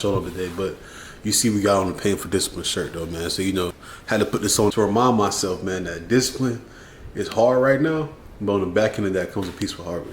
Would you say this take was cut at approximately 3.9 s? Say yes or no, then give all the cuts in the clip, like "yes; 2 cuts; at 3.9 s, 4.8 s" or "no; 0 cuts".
yes; 2 cuts; at 3.9 s, 4.7 s